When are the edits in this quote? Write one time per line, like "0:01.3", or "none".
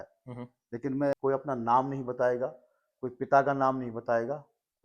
0:01.1